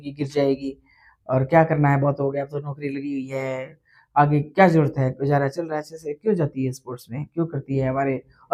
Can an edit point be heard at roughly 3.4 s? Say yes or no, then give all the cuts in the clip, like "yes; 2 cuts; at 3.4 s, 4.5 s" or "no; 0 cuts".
no; 0 cuts